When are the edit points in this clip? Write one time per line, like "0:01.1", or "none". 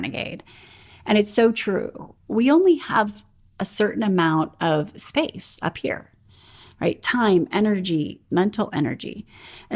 0:08.2

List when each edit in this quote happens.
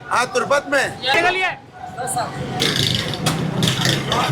0:01.1
0:02.6

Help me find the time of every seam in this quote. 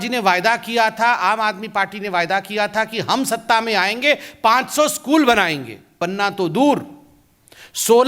0:06.0

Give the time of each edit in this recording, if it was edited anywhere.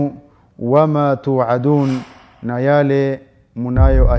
none

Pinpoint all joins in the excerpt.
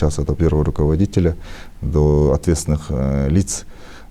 none

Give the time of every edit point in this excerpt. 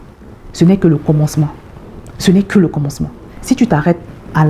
none

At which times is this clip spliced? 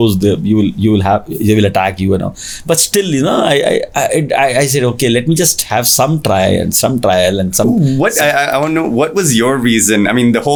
none

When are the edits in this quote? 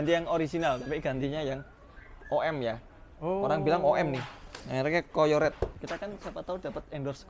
0:05.8

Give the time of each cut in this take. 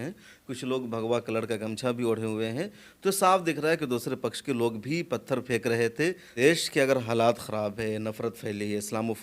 0:06.3

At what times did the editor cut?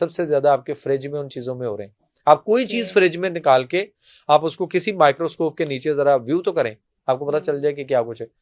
none

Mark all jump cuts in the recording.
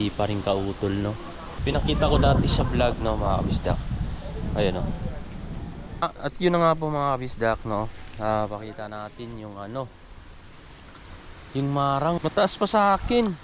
0:01.6
0:06.0
0:12.2

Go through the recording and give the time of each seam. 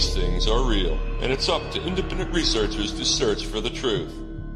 0:01.8

